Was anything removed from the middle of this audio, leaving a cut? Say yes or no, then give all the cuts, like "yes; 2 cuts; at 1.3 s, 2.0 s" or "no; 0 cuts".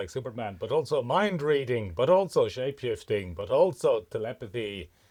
no; 0 cuts